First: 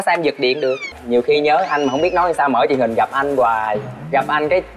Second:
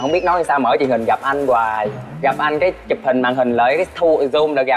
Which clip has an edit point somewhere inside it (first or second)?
first